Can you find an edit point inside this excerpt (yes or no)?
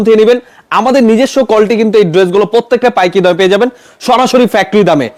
no